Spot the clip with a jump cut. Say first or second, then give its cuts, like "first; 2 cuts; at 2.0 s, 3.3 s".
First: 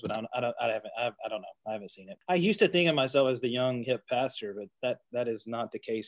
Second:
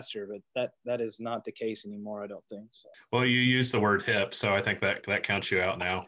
first; 1 cut; at 2.1 s